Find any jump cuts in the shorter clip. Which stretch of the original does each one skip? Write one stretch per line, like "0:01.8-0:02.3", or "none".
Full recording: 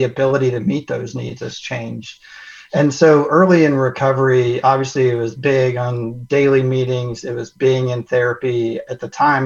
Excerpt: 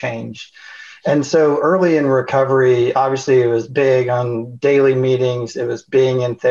none